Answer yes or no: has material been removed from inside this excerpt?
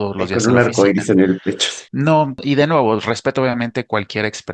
yes